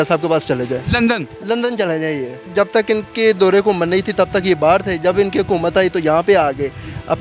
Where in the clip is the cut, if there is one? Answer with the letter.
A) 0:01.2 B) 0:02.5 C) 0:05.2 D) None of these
B